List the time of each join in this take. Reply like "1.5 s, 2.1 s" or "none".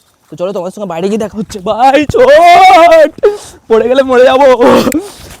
none